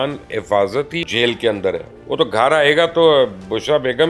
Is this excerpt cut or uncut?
cut